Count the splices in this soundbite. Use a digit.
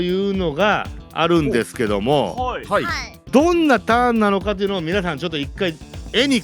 1